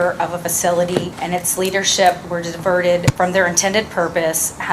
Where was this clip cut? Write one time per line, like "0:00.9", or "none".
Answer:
0:01.2
0:03.1